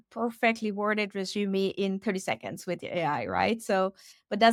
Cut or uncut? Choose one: uncut